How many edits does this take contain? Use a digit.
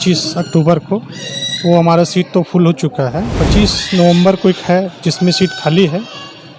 1